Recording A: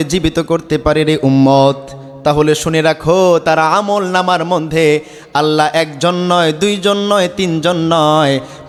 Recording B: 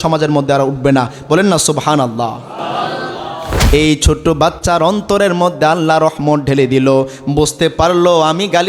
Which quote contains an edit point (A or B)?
B